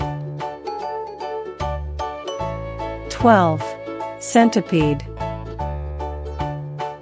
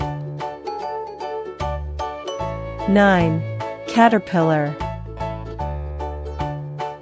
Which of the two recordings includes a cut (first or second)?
first